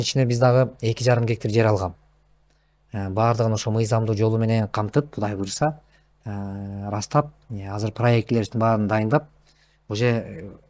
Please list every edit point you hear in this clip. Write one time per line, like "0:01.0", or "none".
none